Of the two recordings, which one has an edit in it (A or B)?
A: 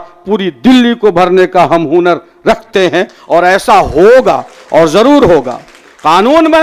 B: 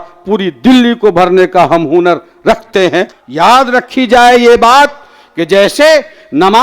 B